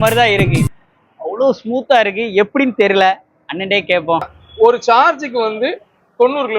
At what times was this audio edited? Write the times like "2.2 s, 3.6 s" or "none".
4.4 s